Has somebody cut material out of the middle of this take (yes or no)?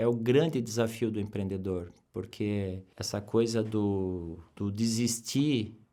no